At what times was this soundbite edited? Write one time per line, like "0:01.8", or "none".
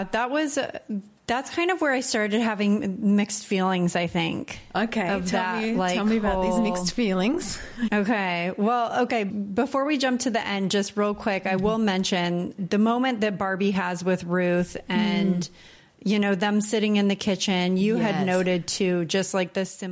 0:07.9
0:09.3
0:12.6